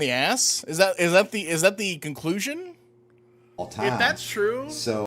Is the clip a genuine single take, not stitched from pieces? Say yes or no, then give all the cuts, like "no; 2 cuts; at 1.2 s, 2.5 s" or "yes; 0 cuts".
no; 1 cut; at 3.6 s